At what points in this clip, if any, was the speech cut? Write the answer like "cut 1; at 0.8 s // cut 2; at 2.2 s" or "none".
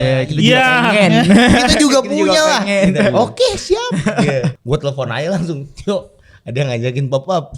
cut 1; at 4.6 s

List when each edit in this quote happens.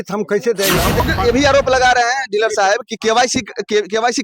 cut 1; at 1.0 s

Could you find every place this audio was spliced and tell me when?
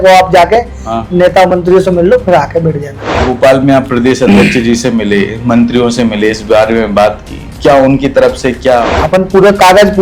cut 1; at 3.2 s // cut 2; at 8.9 s

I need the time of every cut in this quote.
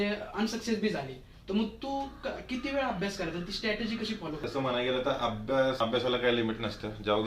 cut 1; at 4.4 s // cut 2; at 5.8 s

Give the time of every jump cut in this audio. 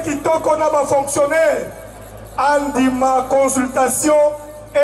none

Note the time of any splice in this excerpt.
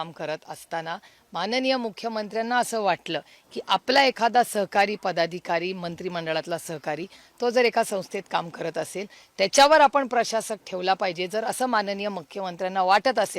none

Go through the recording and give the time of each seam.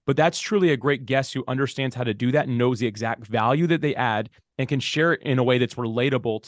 none

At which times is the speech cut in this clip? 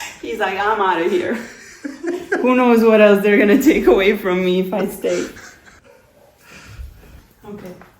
cut 1; at 5.7 s // cut 2; at 7.2 s

